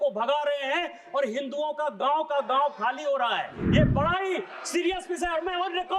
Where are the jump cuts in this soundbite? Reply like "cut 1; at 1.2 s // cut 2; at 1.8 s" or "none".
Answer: cut 1; at 3.6 s